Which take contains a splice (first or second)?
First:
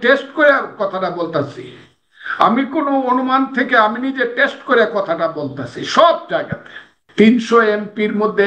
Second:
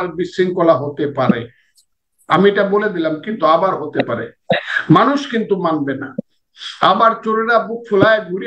first